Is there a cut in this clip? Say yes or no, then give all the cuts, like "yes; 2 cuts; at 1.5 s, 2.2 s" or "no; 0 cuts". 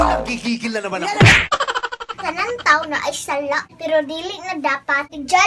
no; 0 cuts